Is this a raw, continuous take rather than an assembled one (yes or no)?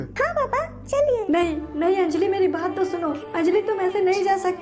no